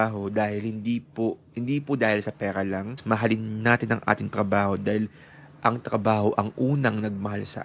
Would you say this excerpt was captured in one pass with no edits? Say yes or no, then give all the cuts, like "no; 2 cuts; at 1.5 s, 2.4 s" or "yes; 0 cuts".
yes; 0 cuts